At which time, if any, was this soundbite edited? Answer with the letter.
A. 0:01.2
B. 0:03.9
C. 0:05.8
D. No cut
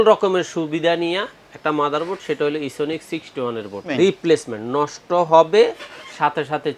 B